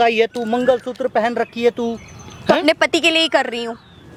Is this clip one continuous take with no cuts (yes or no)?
yes